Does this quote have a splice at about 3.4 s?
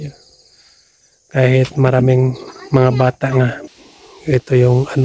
yes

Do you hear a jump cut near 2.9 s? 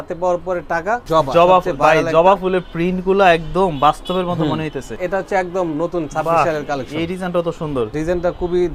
no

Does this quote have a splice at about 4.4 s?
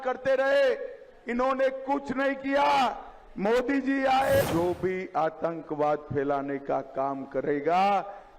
yes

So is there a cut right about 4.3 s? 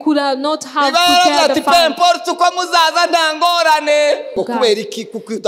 yes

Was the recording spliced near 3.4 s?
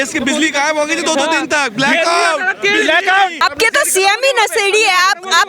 yes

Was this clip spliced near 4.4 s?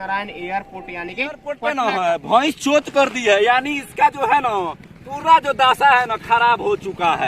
no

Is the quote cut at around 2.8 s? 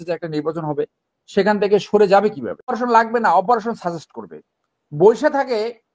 yes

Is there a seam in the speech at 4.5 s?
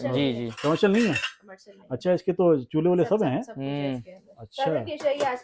no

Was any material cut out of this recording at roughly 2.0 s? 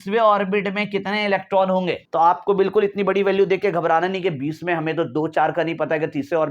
yes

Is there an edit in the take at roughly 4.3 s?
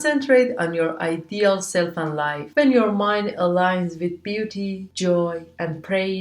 no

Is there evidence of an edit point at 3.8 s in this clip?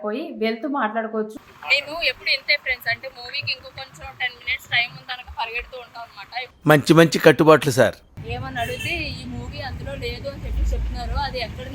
no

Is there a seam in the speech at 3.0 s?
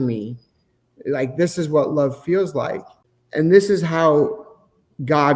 no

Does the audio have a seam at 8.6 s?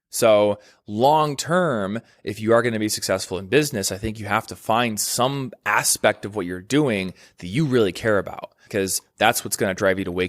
yes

